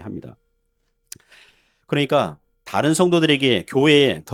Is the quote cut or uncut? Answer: uncut